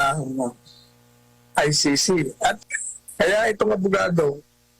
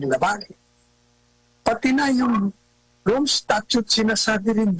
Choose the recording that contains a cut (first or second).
first